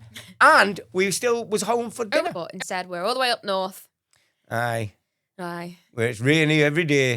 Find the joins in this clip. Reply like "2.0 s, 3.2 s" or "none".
2.4 s